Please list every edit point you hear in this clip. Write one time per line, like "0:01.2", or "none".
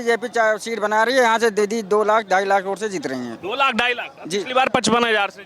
none